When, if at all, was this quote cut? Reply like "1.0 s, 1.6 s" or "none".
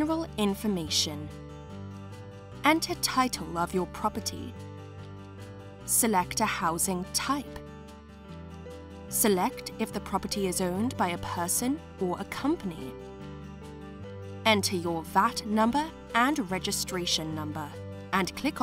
7.4 s, 9.1 s